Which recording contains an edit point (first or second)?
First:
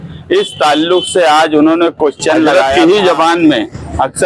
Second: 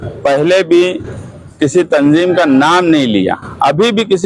first